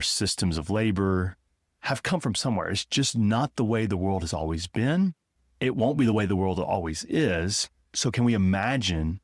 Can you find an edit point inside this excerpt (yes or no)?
yes